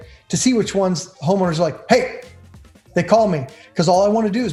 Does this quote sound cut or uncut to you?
uncut